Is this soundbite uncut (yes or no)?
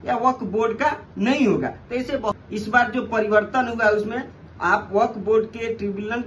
no